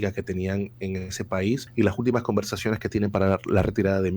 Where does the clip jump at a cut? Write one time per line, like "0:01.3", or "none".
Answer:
0:01.7